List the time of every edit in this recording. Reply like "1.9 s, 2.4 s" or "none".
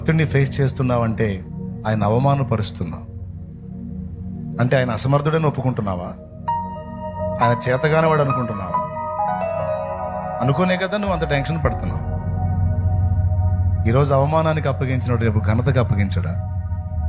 none

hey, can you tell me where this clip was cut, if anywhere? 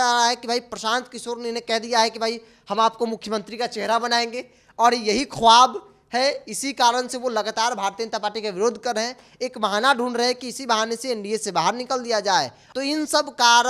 12.6 s

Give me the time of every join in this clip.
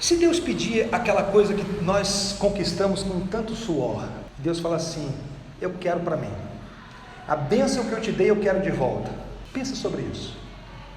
4.2 s, 9.4 s

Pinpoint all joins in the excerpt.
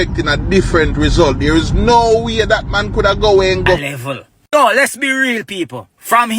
3.8 s

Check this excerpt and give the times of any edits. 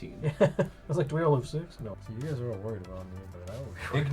2.0 s

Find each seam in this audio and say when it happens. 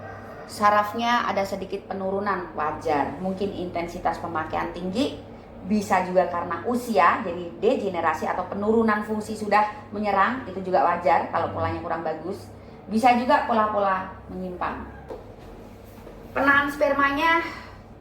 15.2 s

